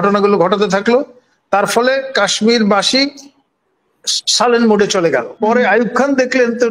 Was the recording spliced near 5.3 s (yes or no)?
yes